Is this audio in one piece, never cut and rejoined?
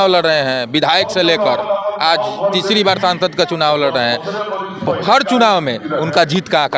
yes; 0 cuts

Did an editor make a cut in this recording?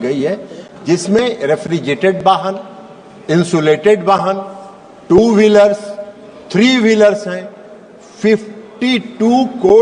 no; 0 cuts

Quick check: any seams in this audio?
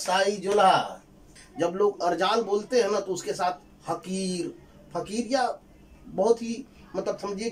yes; 1 cut; at 1.4 s

